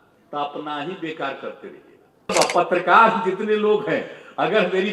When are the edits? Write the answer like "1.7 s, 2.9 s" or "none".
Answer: 2.3 s